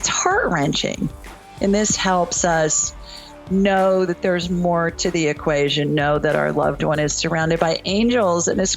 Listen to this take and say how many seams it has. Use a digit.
1